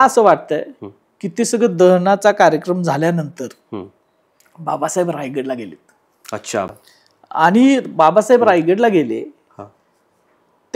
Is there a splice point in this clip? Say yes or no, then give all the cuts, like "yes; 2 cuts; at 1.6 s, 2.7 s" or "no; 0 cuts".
yes; 1 cut; at 6.7 s